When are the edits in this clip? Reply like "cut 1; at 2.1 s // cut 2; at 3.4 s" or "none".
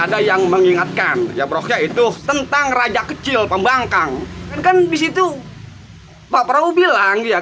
cut 1; at 2.2 s // cut 2; at 4.6 s